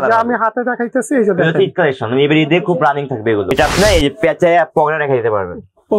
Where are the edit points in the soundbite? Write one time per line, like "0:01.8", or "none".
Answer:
0:03.5